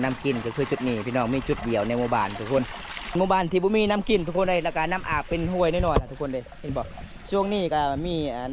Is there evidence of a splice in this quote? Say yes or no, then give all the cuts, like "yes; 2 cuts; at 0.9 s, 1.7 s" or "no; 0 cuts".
yes; 1 cut; at 3.1 s